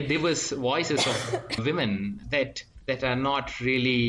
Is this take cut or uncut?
cut